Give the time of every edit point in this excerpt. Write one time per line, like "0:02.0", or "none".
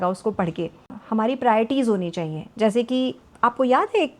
0:01.0
0:03.2